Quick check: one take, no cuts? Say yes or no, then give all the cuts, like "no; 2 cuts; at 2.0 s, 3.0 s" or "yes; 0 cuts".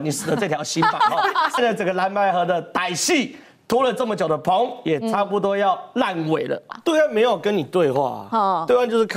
no; 2 cuts; at 1.6 s, 6.7 s